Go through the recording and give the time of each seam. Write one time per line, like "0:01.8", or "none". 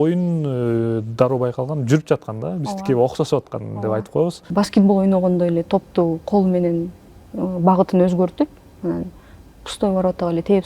0:04.4